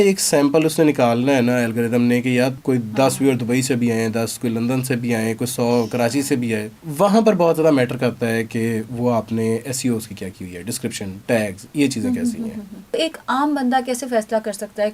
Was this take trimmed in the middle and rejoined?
yes; 3 cuts; at 2.6 s, 6.8 s, 12.9 s

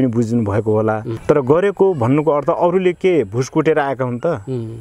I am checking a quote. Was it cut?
yes; 1 cut; at 1.1 s

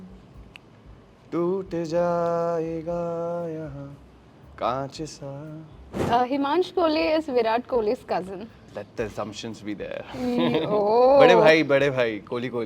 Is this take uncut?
no; 1 cut; at 5.9 s

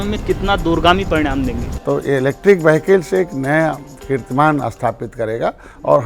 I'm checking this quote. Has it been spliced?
yes; 1 cut; at 1.7 s

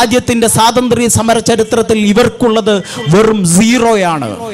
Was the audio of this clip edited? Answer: no; 0 cuts

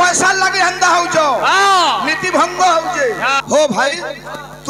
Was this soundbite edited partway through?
yes; 1 cut; at 3.4 s

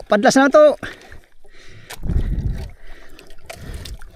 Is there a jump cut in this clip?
no; 0 cuts

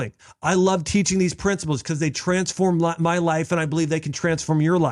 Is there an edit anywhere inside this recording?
no; 0 cuts

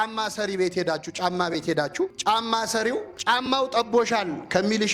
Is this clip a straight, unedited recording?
no; 2 cuts; at 2.2 s, 3.1 s

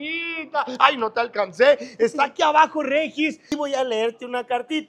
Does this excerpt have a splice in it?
yes; 1 cut; at 3.4 s

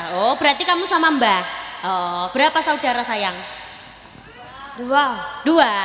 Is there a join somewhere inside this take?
no; 0 cuts

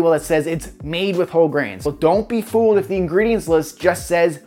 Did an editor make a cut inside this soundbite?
yes; 1 cut; at 1.8 s

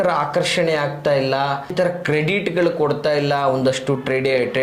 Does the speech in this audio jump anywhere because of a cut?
yes; 1 cut; at 1.7 s

